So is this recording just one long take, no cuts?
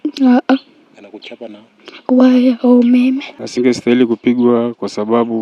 no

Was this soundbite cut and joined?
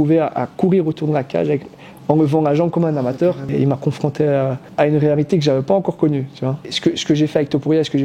yes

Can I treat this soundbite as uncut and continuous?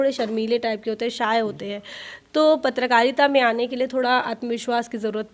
yes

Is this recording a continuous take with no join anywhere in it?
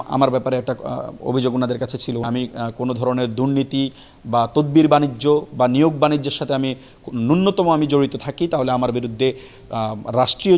no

